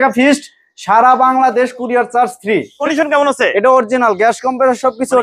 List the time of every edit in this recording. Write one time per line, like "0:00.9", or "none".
0:02.8